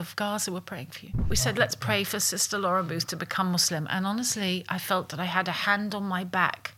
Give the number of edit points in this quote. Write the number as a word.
one